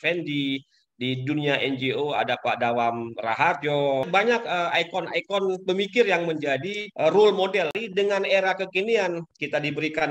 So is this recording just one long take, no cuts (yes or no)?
no